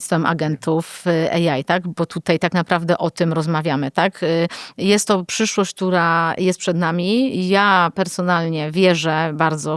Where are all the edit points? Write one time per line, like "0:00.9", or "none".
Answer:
none